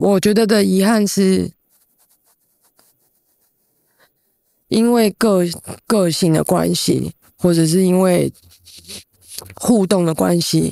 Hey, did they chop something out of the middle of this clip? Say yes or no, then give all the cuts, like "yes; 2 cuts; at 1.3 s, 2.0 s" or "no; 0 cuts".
no; 0 cuts